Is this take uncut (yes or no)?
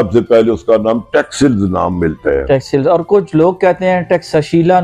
yes